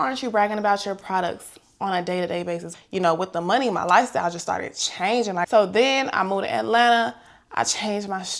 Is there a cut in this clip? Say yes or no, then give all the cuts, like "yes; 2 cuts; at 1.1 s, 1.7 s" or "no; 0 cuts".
yes; 2 cuts; at 2.7 s, 5.5 s